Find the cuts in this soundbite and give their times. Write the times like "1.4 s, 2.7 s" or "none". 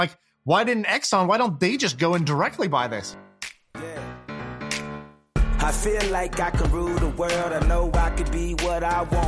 3.0 s

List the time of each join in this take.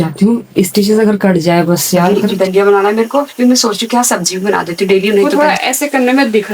2.2 s, 5.3 s

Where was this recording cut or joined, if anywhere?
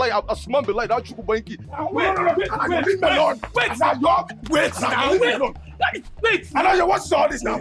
1.6 s

